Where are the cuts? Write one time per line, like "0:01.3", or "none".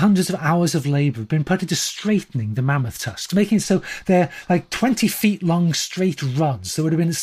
none